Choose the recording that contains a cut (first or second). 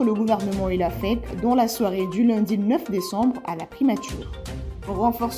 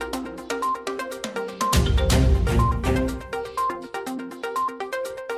second